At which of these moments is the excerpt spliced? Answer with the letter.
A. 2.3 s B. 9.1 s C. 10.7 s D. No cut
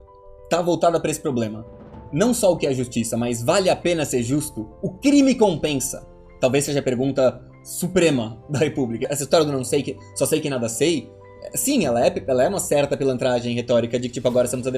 B